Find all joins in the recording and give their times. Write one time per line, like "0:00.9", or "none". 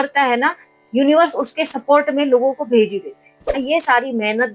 0:03.6